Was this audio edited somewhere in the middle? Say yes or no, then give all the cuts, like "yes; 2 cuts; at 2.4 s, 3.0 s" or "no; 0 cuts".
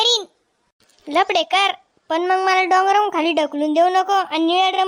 no; 0 cuts